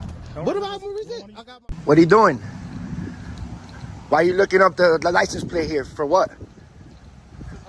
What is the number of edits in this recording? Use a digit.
1